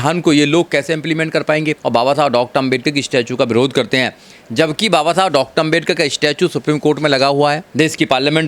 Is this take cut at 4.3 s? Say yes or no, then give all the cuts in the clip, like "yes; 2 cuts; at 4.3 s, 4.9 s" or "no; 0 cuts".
no; 1 cut; at 1.8 s